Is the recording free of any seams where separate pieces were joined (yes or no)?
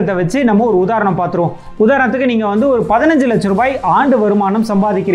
yes